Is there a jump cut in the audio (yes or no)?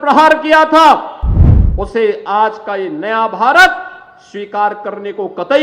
no